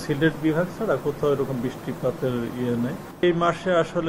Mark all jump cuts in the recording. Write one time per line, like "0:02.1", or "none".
0:03.0